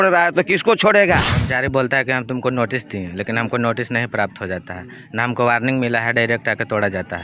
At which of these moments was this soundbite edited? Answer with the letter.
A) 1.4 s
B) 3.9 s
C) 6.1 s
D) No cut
A